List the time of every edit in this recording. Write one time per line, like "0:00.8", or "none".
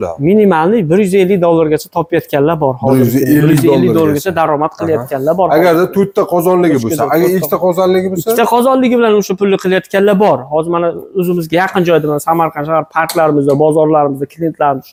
none